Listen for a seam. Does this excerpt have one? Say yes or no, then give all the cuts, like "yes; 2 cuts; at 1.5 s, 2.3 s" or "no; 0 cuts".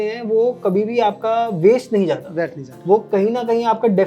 no; 0 cuts